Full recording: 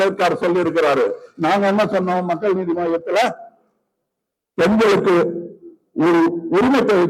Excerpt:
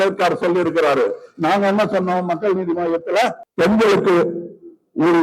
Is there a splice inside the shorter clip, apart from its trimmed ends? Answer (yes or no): yes